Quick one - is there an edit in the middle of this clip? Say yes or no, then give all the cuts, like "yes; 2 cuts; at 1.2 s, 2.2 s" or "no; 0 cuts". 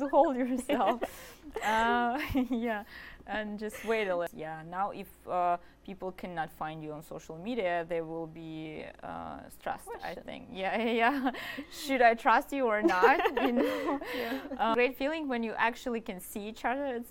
yes; 2 cuts; at 4.3 s, 14.7 s